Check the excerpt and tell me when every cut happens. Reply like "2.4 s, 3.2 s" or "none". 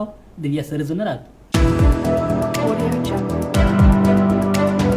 1.3 s

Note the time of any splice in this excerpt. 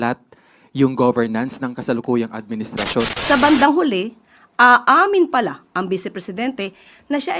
3.1 s

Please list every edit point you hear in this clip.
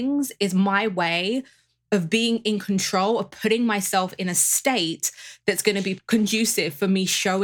6.0 s

